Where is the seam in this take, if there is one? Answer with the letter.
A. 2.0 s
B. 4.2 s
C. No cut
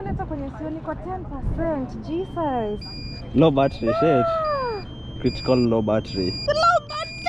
C